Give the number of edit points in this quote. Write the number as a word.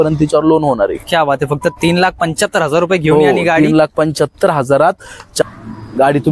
one